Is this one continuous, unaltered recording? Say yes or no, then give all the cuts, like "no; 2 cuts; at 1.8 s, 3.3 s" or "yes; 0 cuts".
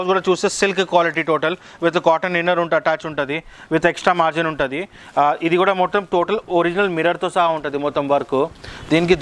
yes; 0 cuts